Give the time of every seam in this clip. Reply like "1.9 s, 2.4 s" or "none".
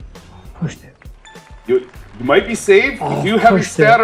none